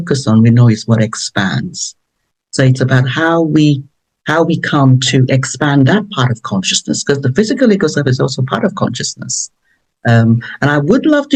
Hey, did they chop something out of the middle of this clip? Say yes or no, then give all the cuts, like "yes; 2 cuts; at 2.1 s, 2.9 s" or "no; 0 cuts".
no; 0 cuts